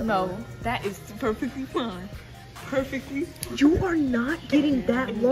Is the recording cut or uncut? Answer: uncut